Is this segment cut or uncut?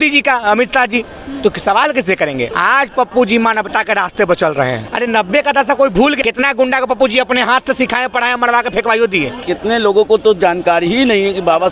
cut